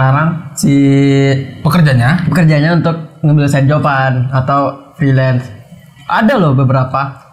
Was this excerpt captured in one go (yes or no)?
yes